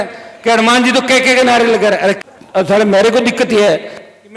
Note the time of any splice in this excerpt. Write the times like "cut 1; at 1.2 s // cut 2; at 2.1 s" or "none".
cut 1; at 2.2 s